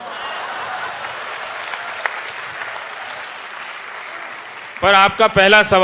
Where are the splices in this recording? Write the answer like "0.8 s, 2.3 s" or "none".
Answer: none